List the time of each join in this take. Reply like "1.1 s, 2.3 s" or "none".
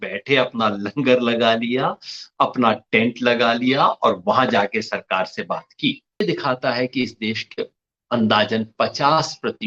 6.2 s